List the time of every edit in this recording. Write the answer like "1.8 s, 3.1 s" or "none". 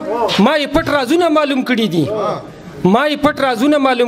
none